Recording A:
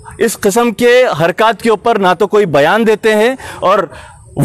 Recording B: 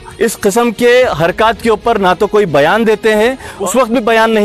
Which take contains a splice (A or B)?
B